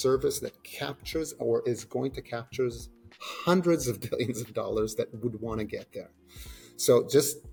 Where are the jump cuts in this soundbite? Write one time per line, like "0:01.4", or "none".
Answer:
none